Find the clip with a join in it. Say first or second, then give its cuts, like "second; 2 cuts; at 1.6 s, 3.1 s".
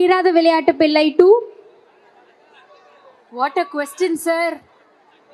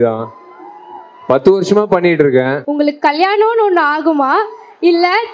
second; 1 cut; at 2.6 s